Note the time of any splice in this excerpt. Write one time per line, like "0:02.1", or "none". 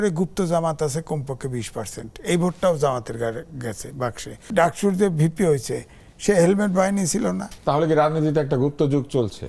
0:04.5
0:07.5